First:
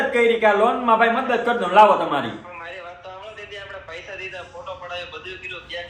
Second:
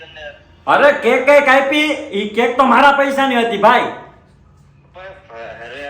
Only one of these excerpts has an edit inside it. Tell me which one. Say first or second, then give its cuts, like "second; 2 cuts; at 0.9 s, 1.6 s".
second; 1 cut; at 4.1 s